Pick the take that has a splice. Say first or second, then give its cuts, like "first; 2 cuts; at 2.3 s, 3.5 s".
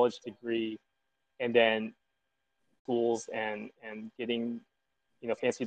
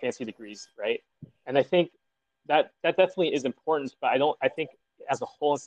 first; 1 cut; at 2.8 s